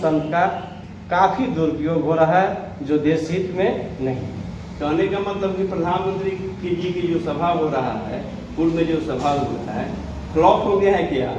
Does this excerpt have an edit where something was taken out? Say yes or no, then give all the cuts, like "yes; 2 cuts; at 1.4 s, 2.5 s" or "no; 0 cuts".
no; 0 cuts